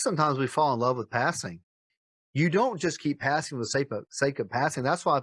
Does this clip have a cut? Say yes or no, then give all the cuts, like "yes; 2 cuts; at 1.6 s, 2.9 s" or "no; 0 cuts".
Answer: yes; 1 cut; at 1.9 s